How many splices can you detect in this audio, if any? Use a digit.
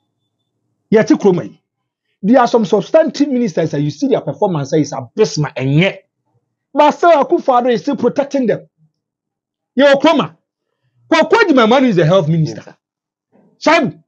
0